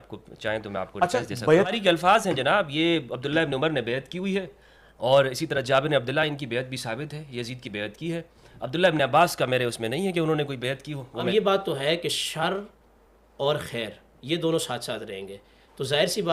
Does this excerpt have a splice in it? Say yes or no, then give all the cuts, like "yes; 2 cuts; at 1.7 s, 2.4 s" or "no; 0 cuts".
yes; 1 cut; at 11.0 s